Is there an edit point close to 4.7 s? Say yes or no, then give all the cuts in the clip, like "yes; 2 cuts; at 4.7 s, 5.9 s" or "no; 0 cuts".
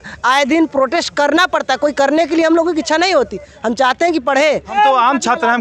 yes; 1 cut; at 4.7 s